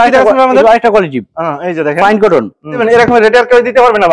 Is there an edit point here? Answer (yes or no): yes